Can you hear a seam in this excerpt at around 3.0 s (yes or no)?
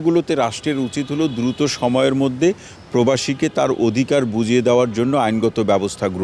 no